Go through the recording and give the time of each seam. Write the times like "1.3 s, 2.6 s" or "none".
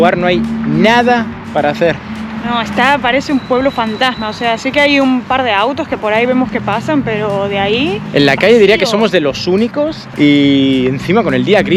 none

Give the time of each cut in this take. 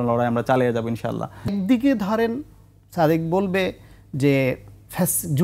1.5 s

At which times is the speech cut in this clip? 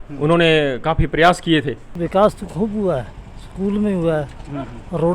2.0 s

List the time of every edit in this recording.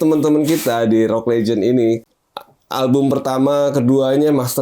2.1 s

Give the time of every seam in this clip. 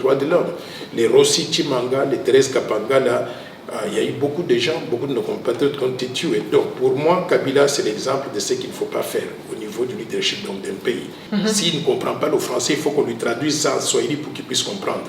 11.2 s

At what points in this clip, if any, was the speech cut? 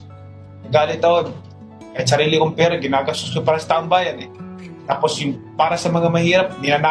none

